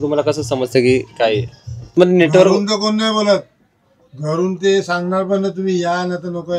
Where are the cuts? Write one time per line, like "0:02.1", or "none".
0:01.9